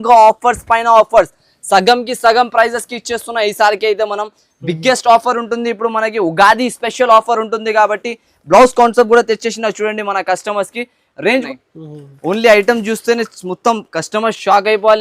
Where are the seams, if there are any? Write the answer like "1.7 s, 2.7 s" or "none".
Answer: 11.4 s